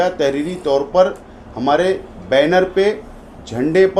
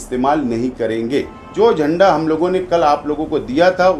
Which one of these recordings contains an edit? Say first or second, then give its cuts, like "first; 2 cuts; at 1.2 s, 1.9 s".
second; 1 cut; at 1.4 s